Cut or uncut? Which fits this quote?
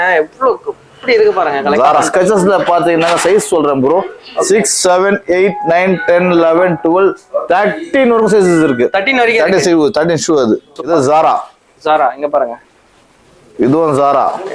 cut